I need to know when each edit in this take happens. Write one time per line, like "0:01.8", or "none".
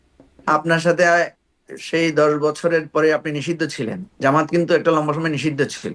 none